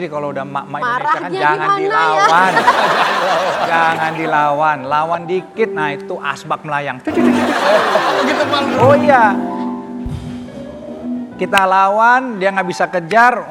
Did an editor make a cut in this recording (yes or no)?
no